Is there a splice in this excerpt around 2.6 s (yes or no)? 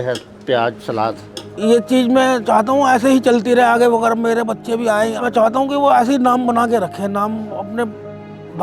no